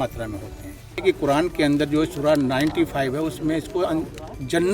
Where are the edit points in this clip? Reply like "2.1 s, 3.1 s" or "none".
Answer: 1.0 s